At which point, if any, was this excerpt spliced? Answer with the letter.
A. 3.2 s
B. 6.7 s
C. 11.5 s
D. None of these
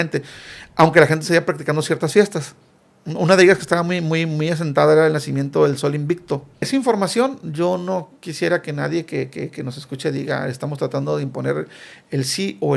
B